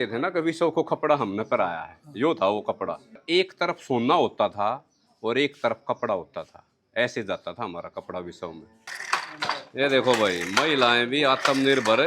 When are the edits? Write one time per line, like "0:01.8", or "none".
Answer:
0:03.1
0:08.9

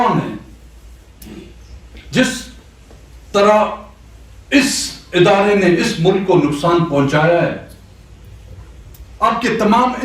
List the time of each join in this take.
none

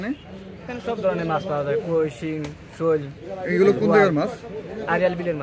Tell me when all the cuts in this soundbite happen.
none

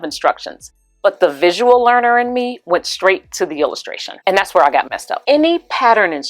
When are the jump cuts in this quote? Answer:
0:05.1

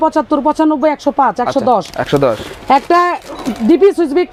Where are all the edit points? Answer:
none

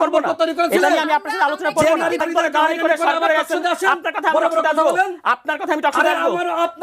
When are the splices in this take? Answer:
0:02.2

